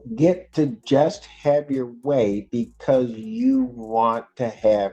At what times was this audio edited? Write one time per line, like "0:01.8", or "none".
none